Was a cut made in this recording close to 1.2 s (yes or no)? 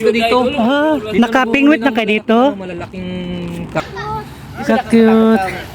no